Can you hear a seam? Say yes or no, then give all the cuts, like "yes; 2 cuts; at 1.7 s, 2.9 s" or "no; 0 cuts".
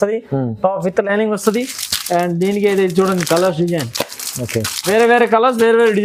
no; 0 cuts